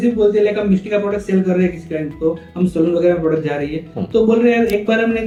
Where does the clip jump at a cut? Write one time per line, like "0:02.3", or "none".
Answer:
none